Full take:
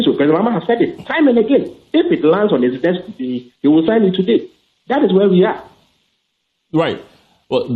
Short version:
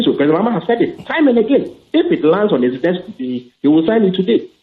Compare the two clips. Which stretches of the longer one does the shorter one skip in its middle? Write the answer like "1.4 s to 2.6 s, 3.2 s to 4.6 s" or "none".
none

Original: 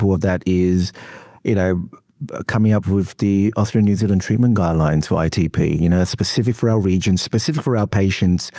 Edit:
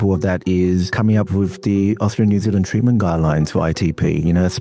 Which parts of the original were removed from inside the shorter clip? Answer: 0.9 s to 2.5 s

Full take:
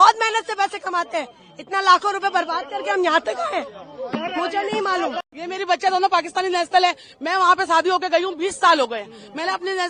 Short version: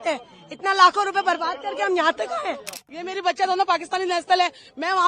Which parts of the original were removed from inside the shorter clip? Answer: 3.9 s to 5.3 s

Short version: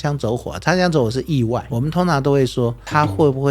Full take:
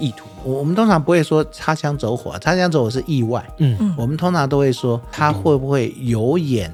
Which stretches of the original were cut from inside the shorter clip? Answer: 3.5 s to 4.0 s

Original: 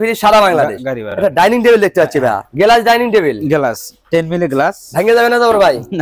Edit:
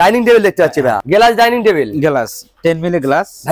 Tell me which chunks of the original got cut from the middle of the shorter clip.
2.4 s to 2.5 s

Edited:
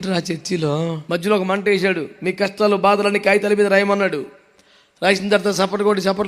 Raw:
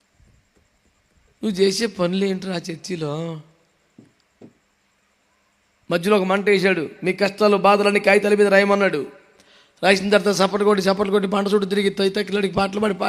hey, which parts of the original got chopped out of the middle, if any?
3.4 s to 5.8 s

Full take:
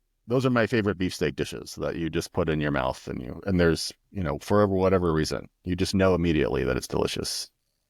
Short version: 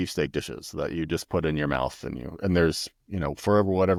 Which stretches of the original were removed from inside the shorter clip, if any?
none

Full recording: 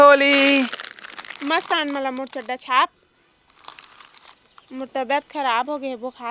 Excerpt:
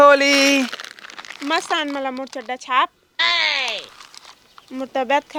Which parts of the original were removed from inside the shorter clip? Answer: none

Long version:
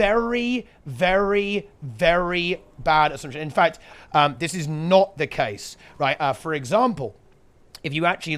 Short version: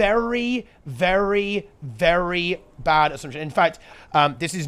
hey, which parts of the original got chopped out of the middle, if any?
none

